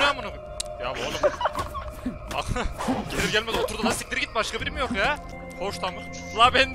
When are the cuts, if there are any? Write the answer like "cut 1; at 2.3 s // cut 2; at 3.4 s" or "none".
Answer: cut 1; at 5.4 s